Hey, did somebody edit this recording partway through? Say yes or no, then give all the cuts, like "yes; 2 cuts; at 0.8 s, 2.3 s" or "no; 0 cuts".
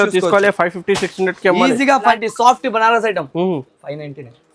yes; 1 cut; at 2.2 s